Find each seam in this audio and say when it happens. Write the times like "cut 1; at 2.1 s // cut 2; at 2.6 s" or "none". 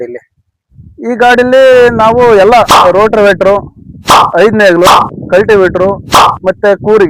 none